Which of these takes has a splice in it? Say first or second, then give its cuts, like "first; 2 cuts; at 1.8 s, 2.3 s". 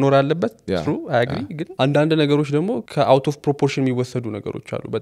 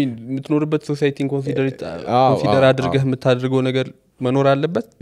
first; 2 cuts; at 1.6 s, 2.8 s